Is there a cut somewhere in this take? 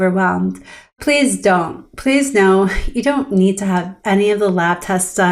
yes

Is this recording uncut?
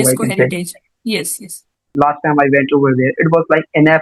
no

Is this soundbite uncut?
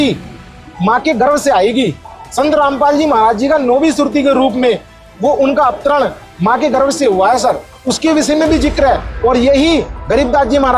yes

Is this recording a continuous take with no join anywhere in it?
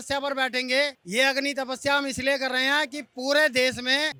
yes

